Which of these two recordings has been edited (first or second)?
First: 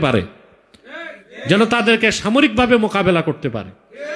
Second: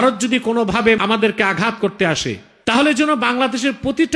second